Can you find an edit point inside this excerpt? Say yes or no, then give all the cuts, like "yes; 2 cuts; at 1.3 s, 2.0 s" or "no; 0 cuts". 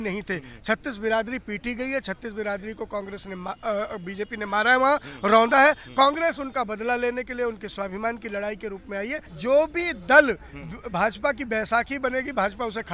yes; 1 cut; at 9.2 s